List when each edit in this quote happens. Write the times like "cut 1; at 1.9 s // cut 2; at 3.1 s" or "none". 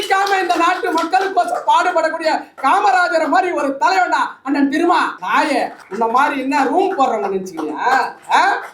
cut 1; at 5.4 s